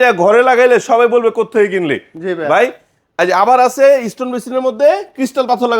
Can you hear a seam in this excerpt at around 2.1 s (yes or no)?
no